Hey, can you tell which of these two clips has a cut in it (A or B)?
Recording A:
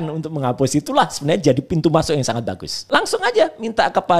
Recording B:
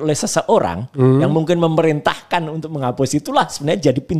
A